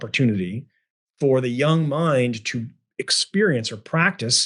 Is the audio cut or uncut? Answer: uncut